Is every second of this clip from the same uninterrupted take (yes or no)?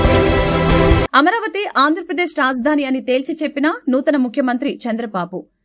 no